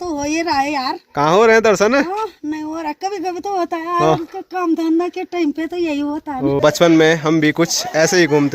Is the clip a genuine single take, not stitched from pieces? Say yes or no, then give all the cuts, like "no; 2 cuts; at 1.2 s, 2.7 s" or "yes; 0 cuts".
no; 1 cut; at 6.6 s